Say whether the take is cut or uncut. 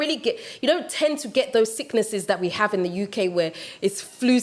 uncut